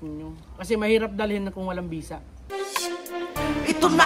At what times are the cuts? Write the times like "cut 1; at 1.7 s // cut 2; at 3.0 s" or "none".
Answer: cut 1; at 2.5 s